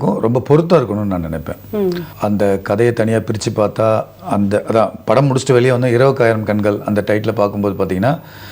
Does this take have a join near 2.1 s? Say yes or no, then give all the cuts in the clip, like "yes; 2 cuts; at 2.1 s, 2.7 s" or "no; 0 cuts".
yes; 1 cut; at 2.1 s